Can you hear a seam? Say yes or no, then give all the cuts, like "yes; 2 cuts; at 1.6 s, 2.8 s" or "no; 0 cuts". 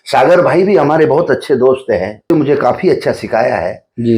yes; 1 cut; at 2.3 s